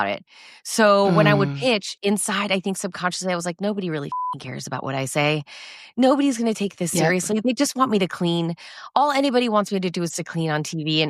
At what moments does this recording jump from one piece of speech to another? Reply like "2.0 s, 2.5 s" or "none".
none

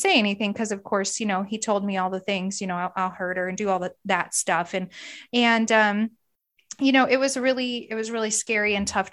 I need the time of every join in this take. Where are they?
none

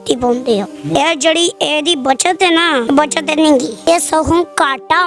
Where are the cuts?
1.0 s, 2.8 s, 3.9 s

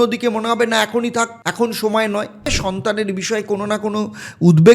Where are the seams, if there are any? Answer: 1.4 s, 2.6 s

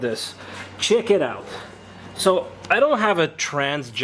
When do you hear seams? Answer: none

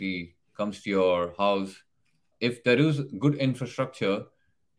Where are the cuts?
2.3 s

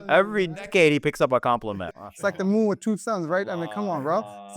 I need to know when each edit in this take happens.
1.9 s

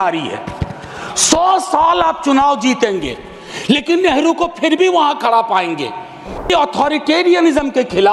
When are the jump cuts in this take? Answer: 6.5 s

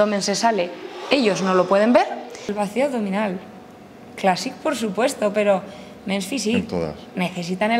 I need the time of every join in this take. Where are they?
2.5 s

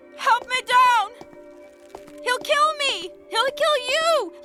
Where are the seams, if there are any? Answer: none

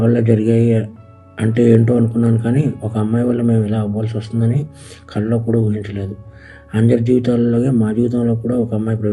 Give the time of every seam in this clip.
none

